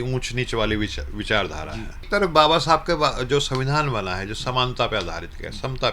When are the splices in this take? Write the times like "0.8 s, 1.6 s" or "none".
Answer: 2.1 s